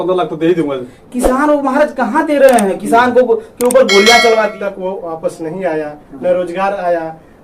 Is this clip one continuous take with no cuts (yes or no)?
no